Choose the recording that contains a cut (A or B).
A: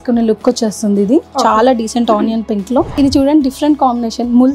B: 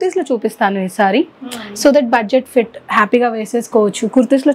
A